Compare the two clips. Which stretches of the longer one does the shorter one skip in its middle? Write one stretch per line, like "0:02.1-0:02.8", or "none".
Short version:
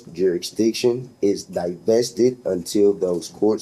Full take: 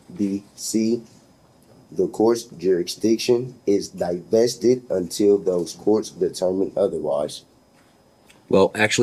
none